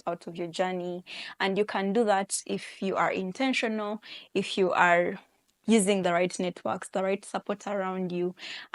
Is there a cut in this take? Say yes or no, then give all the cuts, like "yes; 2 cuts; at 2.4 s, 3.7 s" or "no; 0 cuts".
no; 0 cuts